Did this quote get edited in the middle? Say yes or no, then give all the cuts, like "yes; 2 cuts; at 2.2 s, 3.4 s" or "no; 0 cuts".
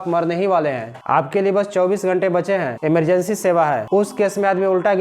yes; 3 cuts; at 0.9 s, 2.7 s, 3.8 s